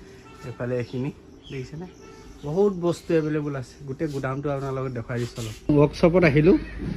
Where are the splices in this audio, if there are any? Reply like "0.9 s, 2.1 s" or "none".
5.7 s